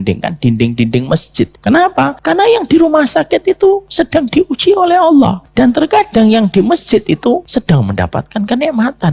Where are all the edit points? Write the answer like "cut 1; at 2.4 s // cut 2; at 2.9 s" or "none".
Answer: cut 1; at 1.6 s // cut 2; at 2.2 s // cut 3; at 5.4 s // cut 4; at 7.5 s